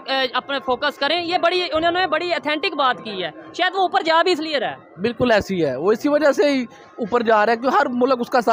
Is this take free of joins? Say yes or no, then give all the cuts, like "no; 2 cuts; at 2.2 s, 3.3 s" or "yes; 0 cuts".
yes; 0 cuts